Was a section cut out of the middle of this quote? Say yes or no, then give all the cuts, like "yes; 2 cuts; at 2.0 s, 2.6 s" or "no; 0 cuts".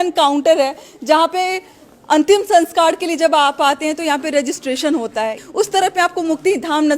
yes; 1 cut; at 5.4 s